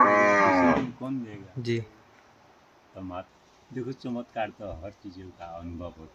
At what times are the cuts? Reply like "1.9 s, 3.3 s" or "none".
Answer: 3.3 s